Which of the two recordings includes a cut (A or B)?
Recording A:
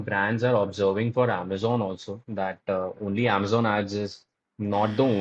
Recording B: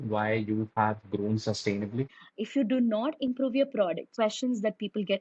B